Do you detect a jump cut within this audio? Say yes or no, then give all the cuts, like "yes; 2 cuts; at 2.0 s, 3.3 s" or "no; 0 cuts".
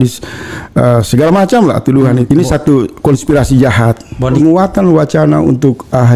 yes; 2 cuts; at 2.2 s, 4.3 s